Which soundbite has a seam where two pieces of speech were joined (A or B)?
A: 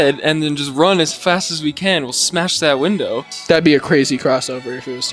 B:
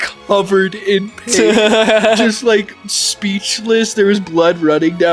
A